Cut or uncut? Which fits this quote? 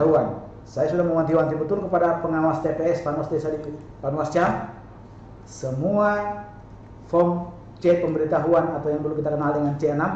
uncut